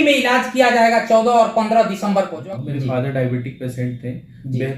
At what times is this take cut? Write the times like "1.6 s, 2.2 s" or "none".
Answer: 2.4 s